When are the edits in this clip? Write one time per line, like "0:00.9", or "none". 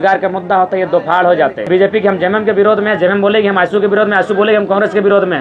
0:01.7